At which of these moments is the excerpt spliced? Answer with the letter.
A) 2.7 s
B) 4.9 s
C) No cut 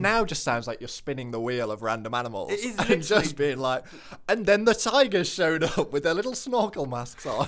C